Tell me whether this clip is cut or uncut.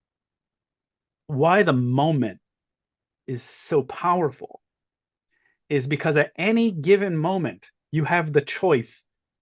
uncut